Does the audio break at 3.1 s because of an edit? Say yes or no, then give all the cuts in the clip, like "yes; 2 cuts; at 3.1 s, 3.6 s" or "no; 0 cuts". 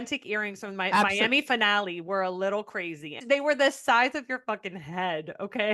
yes; 1 cut; at 3.1 s